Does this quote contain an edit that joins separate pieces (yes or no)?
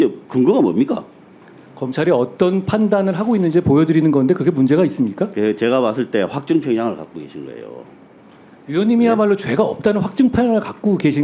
no